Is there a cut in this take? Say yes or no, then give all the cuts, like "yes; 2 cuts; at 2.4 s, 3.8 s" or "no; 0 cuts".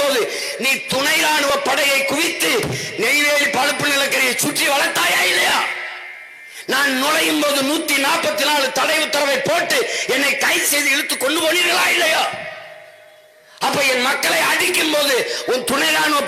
no; 0 cuts